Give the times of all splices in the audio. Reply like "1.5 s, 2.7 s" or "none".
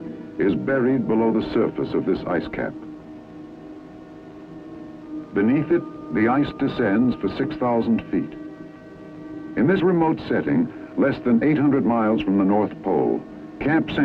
10.9 s